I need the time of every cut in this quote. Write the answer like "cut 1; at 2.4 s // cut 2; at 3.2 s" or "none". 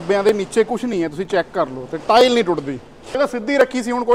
cut 1; at 3.2 s